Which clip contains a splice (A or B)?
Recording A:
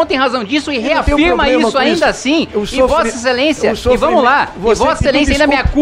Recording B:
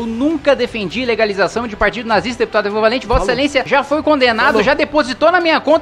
B